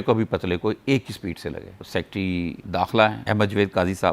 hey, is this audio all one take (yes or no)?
no